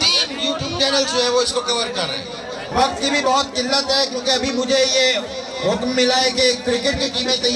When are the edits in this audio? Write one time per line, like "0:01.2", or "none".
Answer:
0:02.6